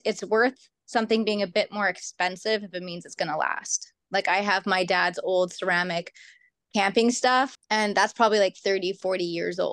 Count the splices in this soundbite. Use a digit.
2